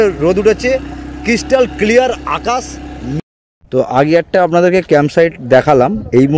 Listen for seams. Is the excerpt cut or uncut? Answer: cut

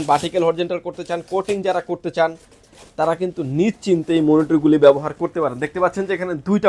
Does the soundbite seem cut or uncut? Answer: uncut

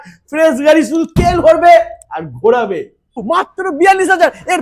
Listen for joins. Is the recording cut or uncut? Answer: cut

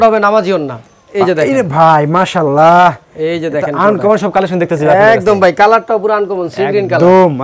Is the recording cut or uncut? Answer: cut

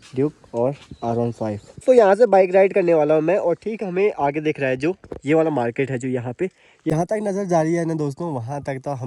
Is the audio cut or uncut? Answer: cut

